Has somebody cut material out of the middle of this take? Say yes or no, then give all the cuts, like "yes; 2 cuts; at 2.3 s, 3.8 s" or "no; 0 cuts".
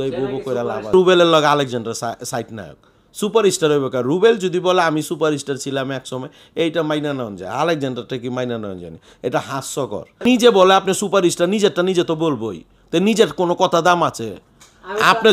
yes; 2 cuts; at 0.9 s, 10.1 s